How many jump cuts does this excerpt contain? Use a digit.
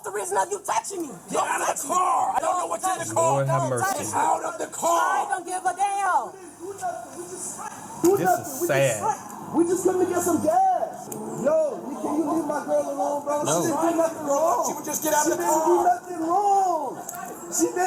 0